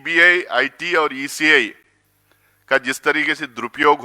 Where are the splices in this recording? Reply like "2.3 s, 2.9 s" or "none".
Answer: none